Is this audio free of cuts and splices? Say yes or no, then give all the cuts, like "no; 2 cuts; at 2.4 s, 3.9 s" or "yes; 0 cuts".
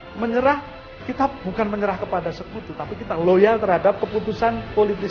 yes; 0 cuts